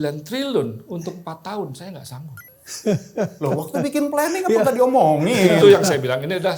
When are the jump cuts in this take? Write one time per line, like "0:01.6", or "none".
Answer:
none